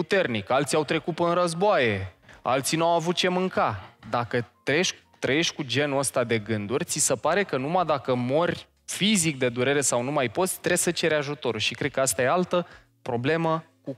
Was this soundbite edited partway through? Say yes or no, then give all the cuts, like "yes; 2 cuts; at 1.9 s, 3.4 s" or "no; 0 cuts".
no; 0 cuts